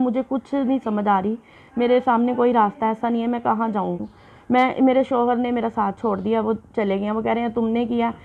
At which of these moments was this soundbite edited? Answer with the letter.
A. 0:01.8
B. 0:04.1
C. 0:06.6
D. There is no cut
B